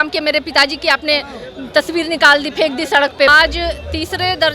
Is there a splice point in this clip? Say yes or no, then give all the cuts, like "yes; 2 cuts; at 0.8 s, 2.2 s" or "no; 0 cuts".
yes; 1 cut; at 3.3 s